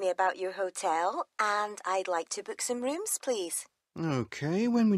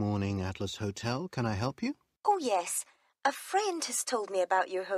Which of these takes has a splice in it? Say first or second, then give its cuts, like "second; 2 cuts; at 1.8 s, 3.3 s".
second; 1 cut; at 2.1 s